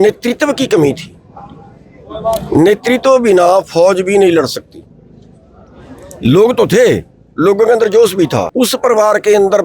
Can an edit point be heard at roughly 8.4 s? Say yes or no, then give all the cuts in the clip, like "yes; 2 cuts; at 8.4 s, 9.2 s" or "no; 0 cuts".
yes; 1 cut; at 8.4 s